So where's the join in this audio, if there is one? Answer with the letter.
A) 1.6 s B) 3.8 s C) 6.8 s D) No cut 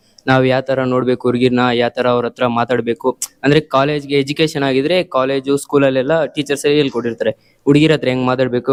D